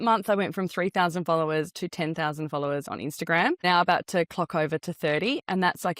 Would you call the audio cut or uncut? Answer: cut